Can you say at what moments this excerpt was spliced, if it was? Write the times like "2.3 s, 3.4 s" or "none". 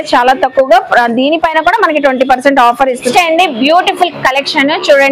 3.1 s